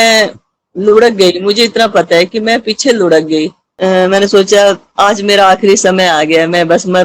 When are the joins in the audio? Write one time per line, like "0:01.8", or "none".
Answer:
0:03.6